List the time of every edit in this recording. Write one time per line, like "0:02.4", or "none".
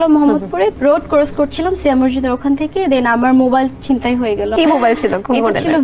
0:00.7
0:04.5